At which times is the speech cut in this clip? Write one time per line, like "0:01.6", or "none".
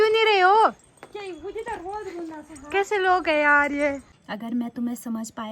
0:04.1